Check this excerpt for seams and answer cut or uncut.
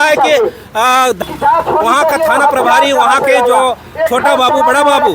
cut